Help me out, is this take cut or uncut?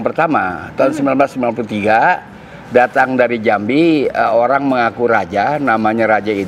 uncut